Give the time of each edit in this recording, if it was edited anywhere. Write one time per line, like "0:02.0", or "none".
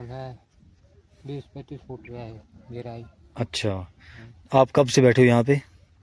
none